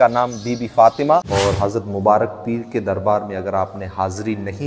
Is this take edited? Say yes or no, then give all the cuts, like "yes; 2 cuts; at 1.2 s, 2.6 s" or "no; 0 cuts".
yes; 1 cut; at 1.2 s